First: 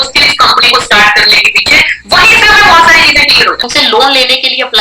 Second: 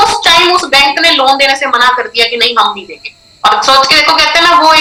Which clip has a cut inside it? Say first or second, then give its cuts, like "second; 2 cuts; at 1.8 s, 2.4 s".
first; 1 cut; at 3.7 s